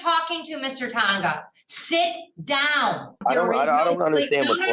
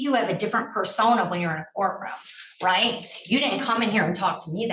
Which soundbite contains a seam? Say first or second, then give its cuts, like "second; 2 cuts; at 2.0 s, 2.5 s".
first; 1 cut; at 3.2 s